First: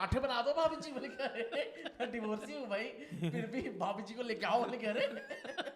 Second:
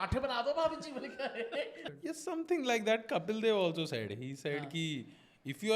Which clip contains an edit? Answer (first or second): second